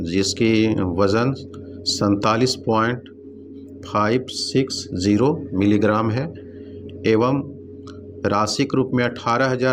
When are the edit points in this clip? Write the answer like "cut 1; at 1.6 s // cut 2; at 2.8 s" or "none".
none